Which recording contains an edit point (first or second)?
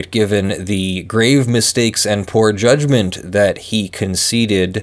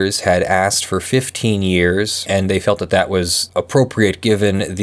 second